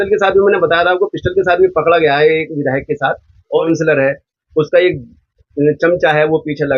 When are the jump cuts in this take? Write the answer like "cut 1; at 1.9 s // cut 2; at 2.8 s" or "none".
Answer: cut 1; at 3.6 s